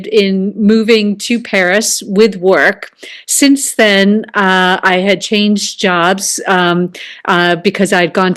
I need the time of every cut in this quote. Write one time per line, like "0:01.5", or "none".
none